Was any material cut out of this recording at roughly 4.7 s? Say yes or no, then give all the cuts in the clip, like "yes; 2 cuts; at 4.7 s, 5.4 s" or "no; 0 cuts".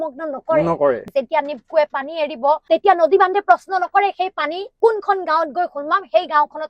yes; 3 cuts; at 1.1 s, 2.6 s, 4.7 s